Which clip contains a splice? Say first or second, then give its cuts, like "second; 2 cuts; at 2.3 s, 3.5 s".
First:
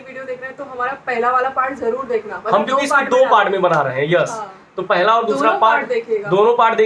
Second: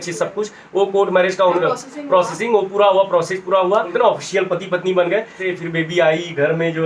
second; 3 cuts; at 1.6 s, 3.9 s, 5.4 s